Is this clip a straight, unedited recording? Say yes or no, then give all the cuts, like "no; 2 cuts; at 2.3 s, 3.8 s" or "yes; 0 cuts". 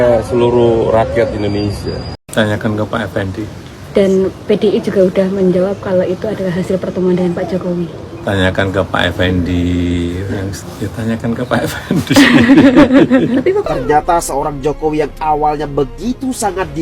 no; 3 cuts; at 2.2 s, 10.5 s, 13.6 s